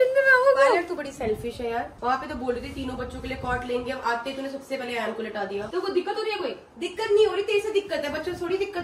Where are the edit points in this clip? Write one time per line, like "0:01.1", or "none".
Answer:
0:01.9
0:05.7